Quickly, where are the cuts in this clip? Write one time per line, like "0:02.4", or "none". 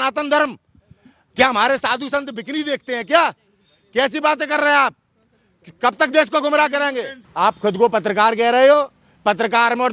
0:07.2